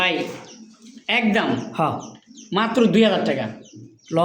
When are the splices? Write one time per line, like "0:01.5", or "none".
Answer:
none